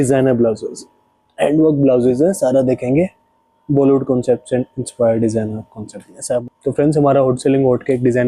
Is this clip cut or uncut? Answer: cut